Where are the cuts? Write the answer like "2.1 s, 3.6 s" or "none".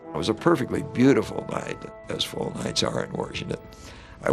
1.9 s